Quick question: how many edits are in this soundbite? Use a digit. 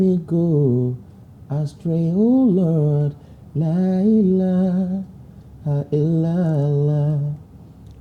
0